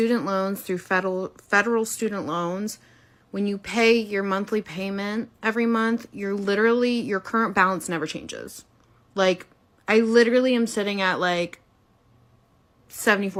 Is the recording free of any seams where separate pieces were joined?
yes; 0 cuts

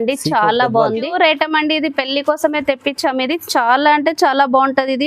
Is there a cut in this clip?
yes; 1 cut; at 1.1 s

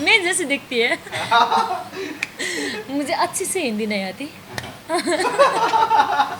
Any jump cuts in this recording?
no; 0 cuts

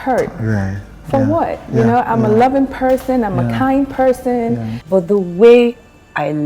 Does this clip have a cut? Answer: yes; 1 cut; at 5.0 s

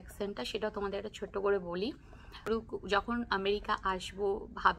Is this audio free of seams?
no; 1 cut; at 2.5 s

